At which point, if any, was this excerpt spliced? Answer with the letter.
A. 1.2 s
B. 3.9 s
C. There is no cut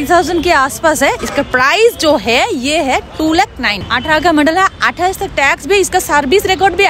B